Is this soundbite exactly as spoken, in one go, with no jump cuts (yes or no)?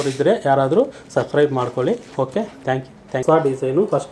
no